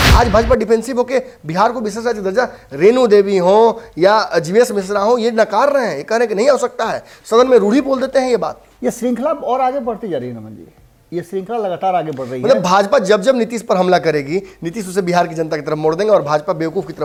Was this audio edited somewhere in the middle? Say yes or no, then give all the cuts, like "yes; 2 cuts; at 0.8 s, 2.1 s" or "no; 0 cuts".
no; 0 cuts